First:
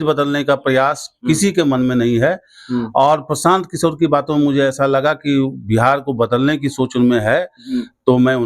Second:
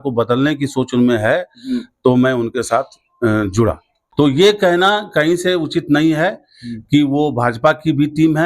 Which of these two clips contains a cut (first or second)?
second